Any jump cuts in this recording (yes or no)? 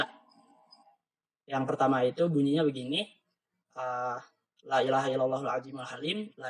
no